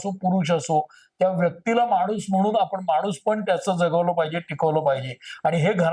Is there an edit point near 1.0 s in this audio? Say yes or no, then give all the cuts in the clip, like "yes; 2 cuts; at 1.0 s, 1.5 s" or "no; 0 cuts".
no; 0 cuts